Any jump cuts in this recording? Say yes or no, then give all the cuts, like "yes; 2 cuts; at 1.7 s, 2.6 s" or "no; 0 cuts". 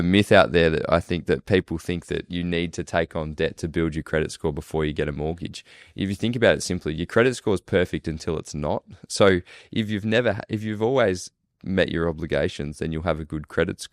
no; 0 cuts